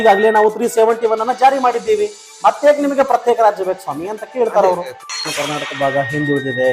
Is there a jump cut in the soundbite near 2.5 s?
no; 1 cut; at 5.3 s

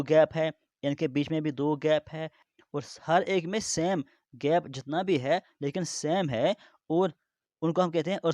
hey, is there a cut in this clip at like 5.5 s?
no; 1 cut; at 2.5 s

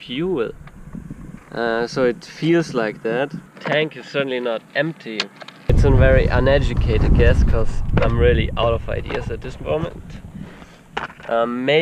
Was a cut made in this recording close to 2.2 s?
no; 2 cuts; at 3.5 s, 5.9 s

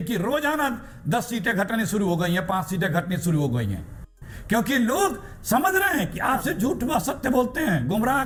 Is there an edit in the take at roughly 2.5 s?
no; 0 cuts

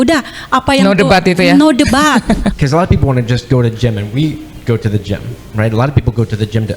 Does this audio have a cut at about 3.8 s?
no; 1 cut; at 2.5 s

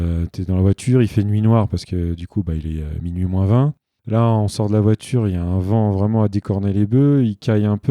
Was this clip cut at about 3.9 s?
yes; 1 cut; at 3.9 s

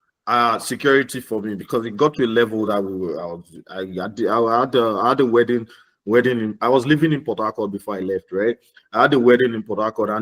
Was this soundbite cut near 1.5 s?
no; 0 cuts

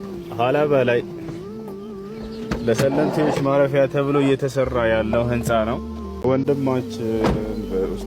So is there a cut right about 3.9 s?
no; 1 cut; at 6.2 s

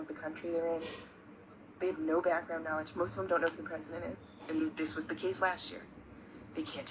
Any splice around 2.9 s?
no; 0 cuts

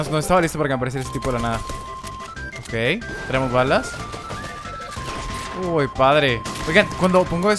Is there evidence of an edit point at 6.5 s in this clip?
yes; 1 cut; at 6.5 s

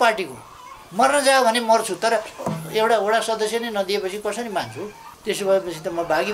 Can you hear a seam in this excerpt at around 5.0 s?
yes; 1 cut; at 5.0 s

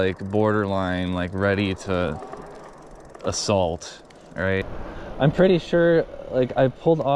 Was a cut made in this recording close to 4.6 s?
yes; 1 cut; at 4.6 s

